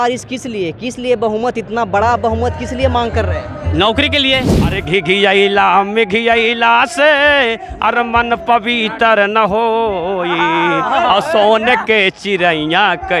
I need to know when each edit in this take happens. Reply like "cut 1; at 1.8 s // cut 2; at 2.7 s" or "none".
cut 1; at 4.8 s